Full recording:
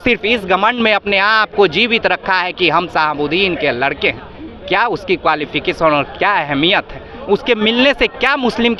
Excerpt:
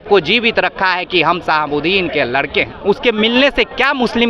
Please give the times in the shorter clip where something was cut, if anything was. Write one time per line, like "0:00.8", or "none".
0:02.7